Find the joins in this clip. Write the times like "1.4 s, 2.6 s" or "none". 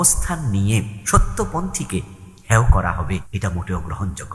1.0 s, 3.3 s